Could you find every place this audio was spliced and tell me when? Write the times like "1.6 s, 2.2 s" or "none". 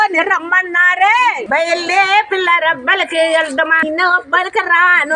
1.4 s, 3.8 s